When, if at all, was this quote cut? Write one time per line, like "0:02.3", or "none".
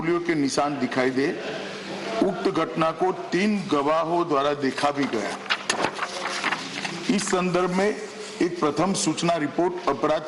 none